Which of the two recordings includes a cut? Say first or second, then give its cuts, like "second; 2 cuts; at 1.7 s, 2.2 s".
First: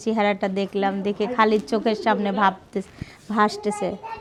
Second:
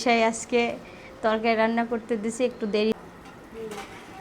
second; 1 cut; at 3.3 s